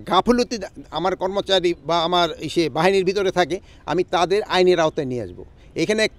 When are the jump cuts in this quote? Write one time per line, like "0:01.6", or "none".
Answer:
none